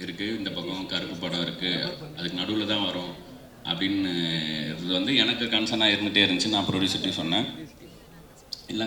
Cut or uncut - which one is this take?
uncut